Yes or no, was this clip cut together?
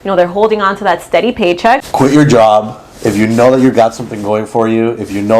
yes